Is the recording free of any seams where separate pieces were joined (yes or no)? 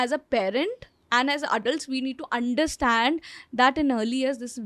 yes